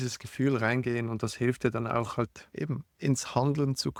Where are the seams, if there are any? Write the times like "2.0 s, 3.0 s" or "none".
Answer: none